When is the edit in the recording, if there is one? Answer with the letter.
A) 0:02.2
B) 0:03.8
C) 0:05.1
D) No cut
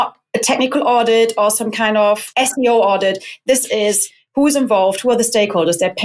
A